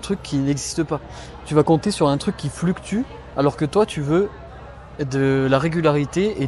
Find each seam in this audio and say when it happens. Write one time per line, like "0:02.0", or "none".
none